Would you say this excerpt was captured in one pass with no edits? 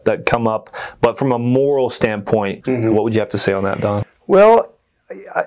no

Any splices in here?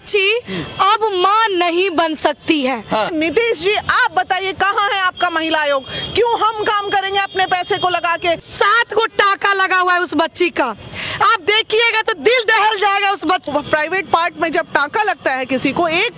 yes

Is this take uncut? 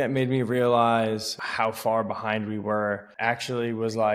no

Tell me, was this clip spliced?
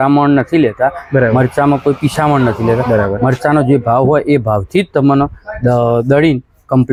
no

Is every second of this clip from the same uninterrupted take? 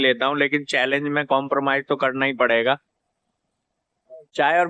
yes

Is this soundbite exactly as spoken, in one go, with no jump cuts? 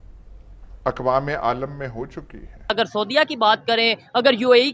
no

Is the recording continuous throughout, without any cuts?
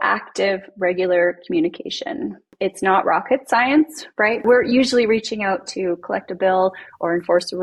no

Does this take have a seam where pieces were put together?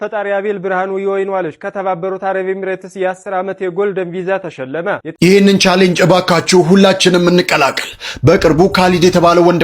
yes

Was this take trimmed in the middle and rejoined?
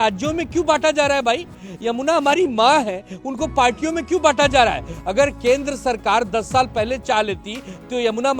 no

